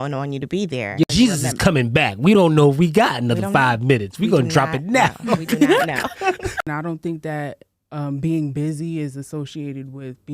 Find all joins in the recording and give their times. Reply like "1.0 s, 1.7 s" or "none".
1.1 s, 6.6 s